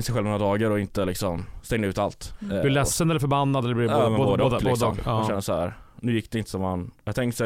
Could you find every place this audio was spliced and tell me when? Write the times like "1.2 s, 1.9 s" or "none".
none